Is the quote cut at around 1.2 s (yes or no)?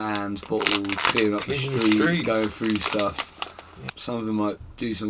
no